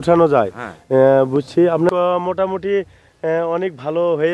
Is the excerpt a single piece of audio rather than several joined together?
no; 1 cut; at 1.9 s

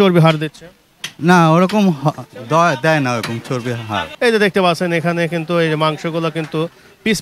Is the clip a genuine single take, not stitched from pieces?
no; 1 cut; at 4.1 s

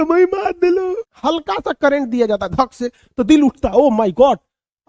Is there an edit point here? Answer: yes; 1 cut; at 1.1 s

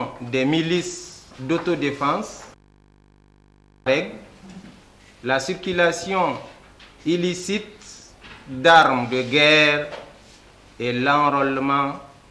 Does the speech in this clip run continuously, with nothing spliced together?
no; 1 cut; at 1.3 s

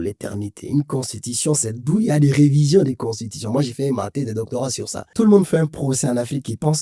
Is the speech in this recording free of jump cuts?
no; 1 cut; at 5.1 s

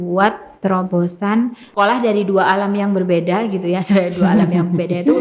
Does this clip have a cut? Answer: yes; 1 cut; at 1.6 s

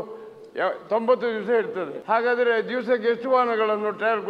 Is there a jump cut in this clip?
yes; 1 cut; at 2.0 s

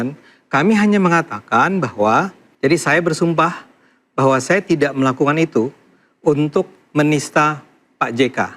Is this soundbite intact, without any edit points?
no; 1 cut; at 2.4 s

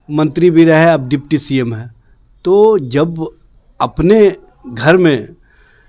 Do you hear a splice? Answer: no; 0 cuts

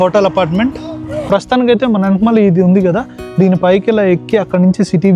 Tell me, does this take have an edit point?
yes; 1 cut; at 1.1 s

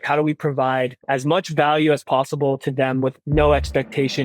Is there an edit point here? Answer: yes; 1 cut; at 1.0 s

